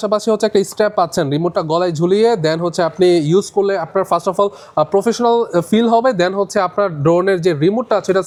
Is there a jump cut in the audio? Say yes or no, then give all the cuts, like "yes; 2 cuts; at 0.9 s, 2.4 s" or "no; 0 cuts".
no; 0 cuts